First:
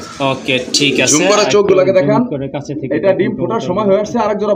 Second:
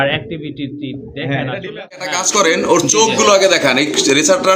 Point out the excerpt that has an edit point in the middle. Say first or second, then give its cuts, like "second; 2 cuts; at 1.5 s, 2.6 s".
second; 1 cut; at 2.0 s